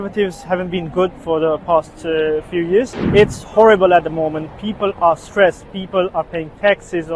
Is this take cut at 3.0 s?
yes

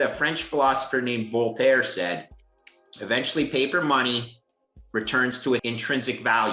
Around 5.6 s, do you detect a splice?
yes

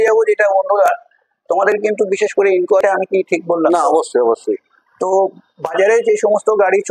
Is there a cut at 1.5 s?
no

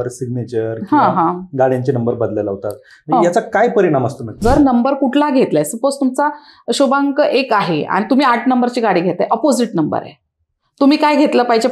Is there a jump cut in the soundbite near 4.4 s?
yes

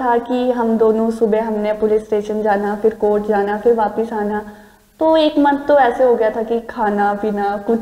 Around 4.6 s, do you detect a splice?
no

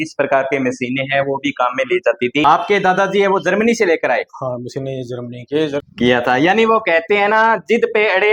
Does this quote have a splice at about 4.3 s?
no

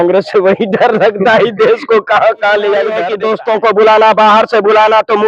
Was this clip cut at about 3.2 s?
yes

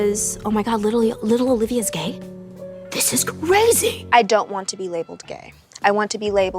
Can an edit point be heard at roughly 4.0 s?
yes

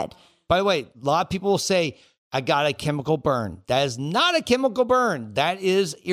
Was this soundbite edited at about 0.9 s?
yes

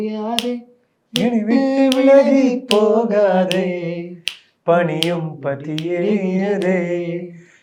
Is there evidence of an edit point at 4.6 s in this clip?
no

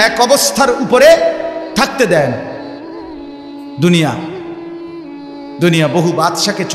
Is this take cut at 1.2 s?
no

